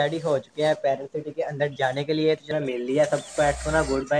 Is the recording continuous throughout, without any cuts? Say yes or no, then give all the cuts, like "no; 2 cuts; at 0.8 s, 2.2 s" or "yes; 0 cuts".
no; 1 cut; at 2.5 s